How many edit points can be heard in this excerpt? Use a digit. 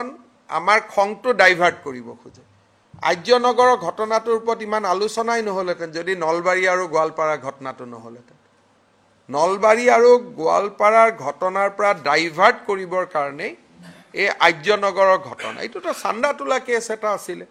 0